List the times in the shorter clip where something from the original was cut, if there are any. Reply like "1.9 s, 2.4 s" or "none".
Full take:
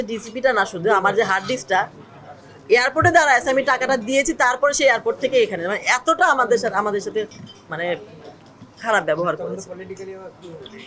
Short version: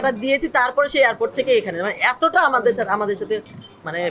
none

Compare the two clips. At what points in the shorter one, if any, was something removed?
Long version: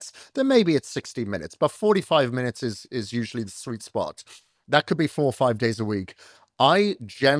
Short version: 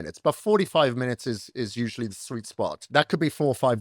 2.8 s

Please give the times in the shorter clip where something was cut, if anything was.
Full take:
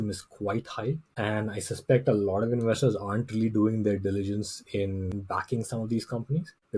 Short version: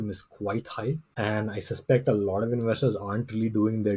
none

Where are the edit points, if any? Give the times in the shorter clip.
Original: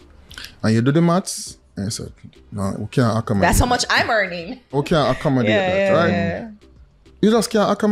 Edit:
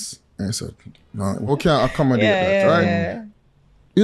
1.4 s

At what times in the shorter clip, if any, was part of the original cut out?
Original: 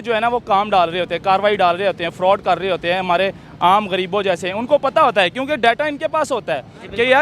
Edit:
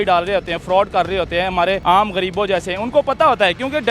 1.8 s

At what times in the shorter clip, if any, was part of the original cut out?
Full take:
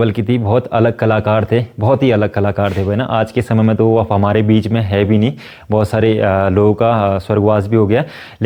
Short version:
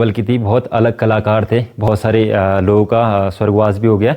1.9 s

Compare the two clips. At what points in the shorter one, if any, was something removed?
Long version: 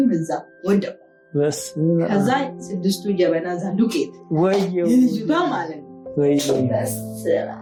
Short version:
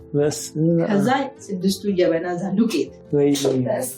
3.0 s

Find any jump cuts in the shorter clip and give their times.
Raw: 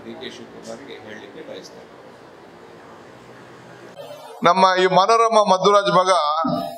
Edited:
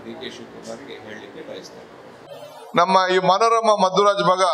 2.2 s

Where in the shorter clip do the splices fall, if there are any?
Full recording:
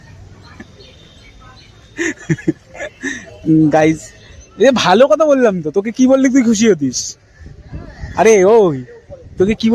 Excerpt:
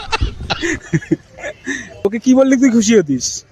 1.9 s

